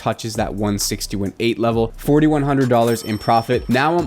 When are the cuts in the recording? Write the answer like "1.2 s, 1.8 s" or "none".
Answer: 1.9 s